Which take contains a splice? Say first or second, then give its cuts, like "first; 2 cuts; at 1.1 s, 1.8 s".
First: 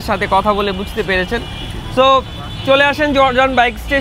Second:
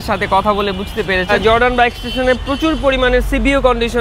second; 1 cut; at 1.3 s